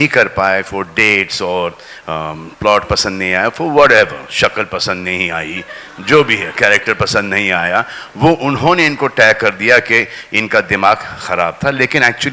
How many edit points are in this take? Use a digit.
0